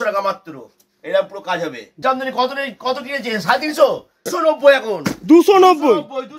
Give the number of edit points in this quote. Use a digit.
1